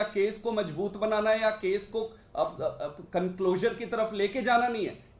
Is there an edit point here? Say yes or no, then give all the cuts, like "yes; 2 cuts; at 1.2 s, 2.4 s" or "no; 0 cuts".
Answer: no; 0 cuts